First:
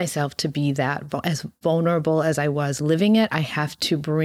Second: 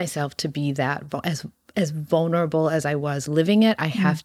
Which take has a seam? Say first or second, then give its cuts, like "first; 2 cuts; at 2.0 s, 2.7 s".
first; 1 cut; at 1.5 s